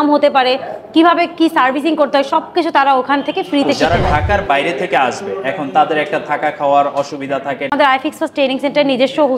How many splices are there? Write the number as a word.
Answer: two